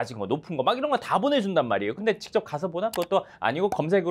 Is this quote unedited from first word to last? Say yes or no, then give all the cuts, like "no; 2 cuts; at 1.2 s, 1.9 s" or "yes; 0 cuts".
no; 1 cut; at 2.0 s